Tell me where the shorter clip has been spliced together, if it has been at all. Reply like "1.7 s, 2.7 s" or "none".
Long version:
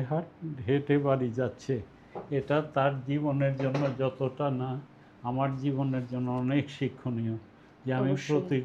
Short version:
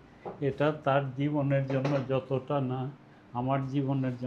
none